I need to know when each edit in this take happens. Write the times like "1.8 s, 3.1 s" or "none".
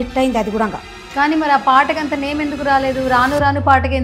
none